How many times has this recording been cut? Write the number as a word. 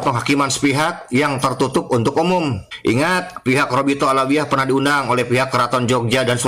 one